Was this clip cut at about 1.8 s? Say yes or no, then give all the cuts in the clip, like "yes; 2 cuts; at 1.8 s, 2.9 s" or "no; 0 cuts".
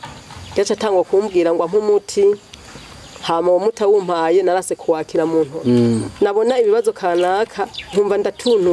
no; 1 cut; at 5.5 s